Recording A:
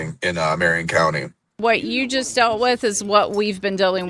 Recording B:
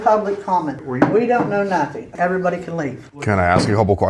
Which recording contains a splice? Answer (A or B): A